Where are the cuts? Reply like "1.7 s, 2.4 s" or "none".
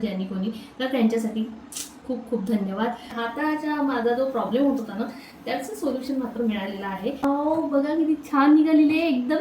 3.1 s, 7.2 s